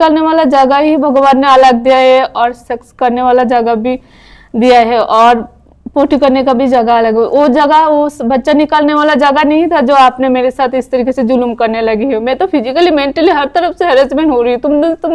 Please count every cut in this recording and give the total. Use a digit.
0